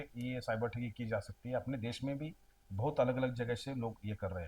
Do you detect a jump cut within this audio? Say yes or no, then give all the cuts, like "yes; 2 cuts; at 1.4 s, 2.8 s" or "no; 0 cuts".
no; 0 cuts